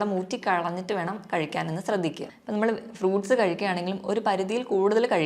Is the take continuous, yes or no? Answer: no